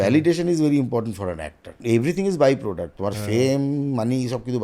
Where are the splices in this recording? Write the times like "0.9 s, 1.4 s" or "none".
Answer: 1.8 s